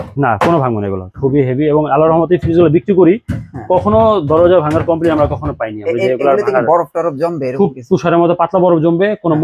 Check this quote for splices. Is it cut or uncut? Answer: uncut